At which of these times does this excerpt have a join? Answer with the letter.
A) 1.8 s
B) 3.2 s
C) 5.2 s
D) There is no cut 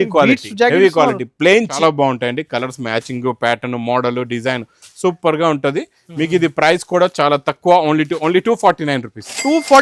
A